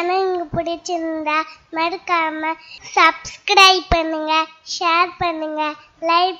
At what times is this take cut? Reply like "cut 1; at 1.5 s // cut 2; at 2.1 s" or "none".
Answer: none